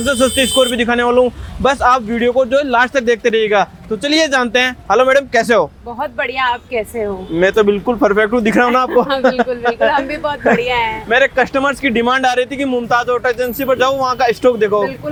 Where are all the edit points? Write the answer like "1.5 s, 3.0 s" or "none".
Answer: none